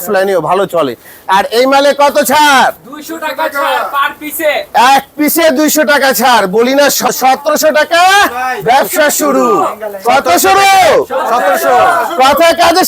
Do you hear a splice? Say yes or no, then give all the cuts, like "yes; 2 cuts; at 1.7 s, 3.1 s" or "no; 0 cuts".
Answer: yes; 1 cut; at 7.1 s